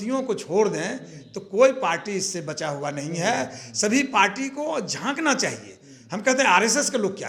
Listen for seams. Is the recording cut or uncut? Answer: uncut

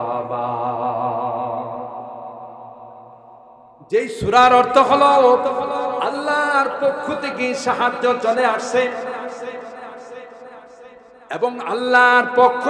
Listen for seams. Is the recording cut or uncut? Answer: uncut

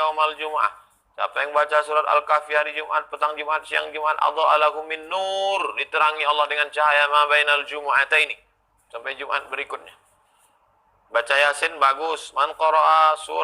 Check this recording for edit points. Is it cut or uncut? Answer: uncut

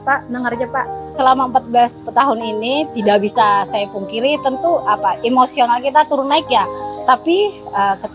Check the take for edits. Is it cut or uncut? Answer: cut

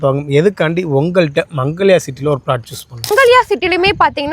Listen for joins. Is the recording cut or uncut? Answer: cut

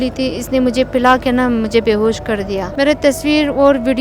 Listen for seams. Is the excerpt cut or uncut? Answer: cut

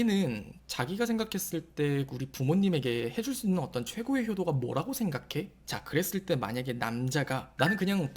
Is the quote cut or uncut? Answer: cut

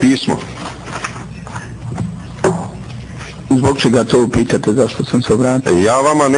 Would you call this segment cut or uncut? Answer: uncut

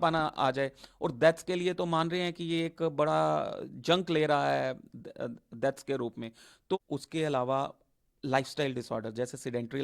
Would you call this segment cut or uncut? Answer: cut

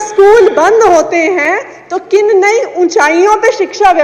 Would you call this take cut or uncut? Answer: uncut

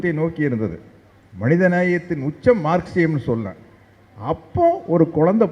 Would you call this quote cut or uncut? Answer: uncut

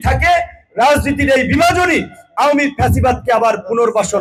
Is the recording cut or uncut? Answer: uncut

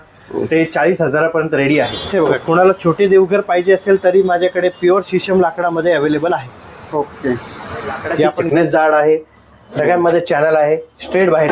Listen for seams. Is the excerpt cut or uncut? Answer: cut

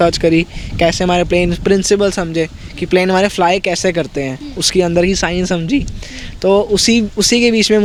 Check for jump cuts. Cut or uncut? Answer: uncut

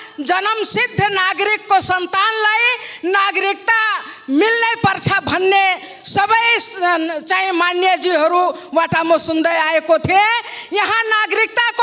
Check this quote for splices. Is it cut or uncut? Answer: uncut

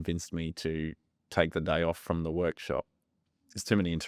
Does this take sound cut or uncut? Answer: uncut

